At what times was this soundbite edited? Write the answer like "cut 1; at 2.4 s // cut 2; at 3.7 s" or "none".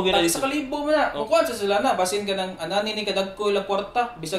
cut 1; at 1.2 s